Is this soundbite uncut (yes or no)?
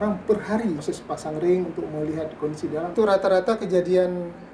no